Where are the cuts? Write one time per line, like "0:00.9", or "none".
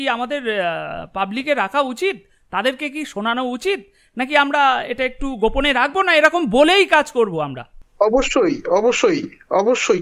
none

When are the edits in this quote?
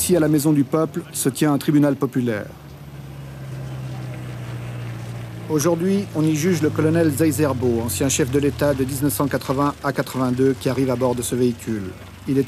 0:06.9

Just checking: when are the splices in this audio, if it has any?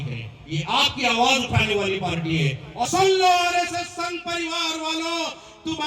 0:02.9

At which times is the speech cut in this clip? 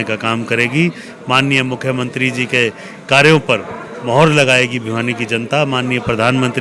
none

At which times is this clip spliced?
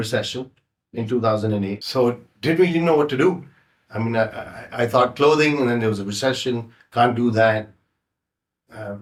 none

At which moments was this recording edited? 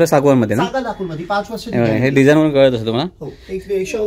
none

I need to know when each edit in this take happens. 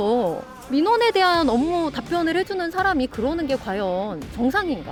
none

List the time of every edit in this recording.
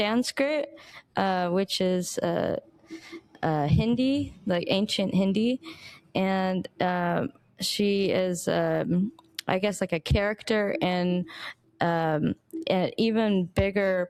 none

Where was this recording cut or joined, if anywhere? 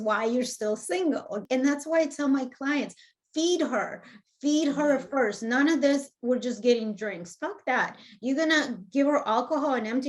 0:01.4

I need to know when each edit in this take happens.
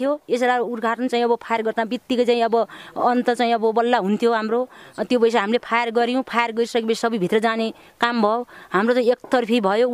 none

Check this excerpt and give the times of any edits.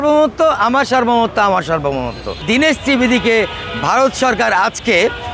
0:02.4

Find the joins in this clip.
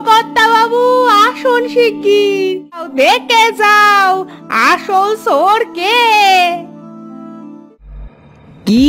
0:02.9
0:07.7

